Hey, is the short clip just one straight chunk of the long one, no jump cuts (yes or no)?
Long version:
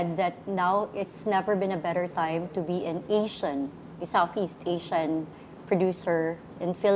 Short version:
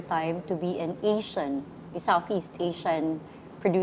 yes